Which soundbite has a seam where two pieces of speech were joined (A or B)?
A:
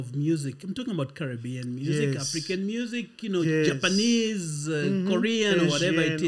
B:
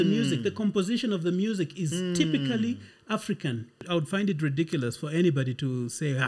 B